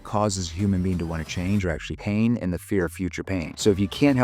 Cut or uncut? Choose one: uncut